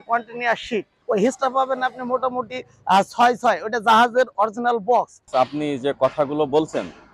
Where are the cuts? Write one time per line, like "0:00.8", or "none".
0:00.9
0:05.3